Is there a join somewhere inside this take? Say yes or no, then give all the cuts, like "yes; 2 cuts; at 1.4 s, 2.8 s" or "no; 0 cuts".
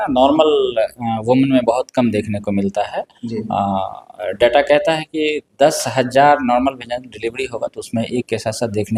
no; 0 cuts